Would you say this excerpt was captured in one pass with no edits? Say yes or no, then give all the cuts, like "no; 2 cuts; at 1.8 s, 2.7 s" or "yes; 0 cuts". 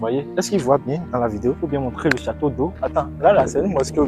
no; 1 cut; at 2.8 s